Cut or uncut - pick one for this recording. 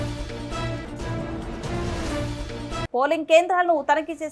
uncut